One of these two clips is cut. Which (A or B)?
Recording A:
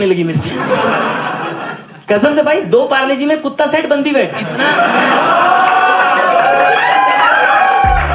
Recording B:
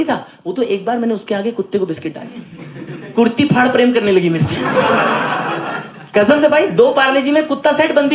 B